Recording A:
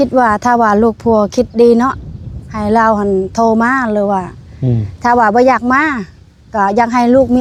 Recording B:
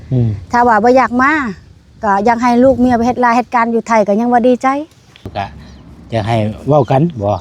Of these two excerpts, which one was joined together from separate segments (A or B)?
B